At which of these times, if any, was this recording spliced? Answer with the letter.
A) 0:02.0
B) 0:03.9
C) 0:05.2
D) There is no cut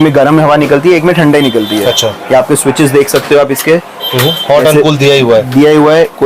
D